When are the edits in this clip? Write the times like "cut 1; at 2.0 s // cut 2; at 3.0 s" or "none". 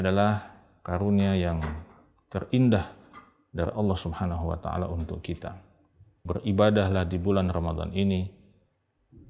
cut 1; at 6.2 s